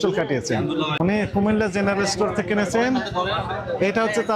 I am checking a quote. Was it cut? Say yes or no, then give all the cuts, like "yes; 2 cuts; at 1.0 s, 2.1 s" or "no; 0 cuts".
yes; 1 cut; at 0.9 s